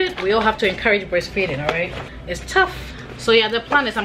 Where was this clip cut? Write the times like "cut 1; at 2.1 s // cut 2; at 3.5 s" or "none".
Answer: none